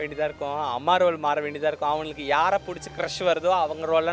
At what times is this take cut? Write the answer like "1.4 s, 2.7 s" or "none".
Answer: none